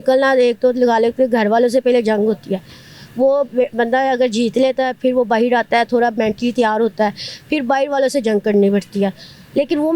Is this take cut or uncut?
uncut